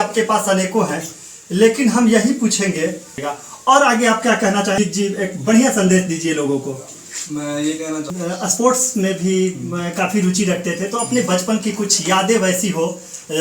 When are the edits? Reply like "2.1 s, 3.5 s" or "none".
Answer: 3.2 s, 4.8 s, 8.1 s

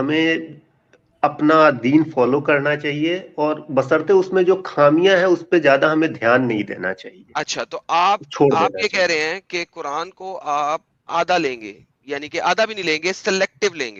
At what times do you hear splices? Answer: none

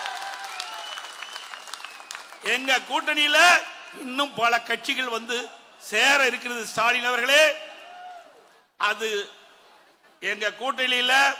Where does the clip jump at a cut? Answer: none

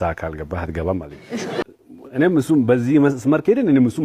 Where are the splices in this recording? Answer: 1.5 s

